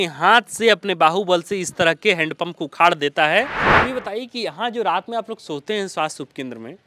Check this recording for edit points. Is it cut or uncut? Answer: cut